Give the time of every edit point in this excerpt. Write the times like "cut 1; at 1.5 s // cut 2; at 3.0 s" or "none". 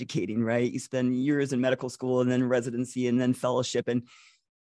none